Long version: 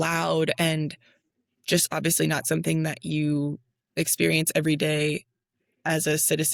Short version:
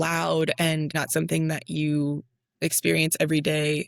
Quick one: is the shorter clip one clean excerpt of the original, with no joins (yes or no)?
no